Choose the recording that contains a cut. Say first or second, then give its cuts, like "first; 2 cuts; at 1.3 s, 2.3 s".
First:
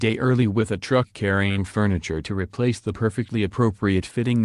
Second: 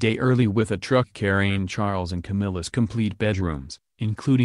second; 1 cut; at 1.7 s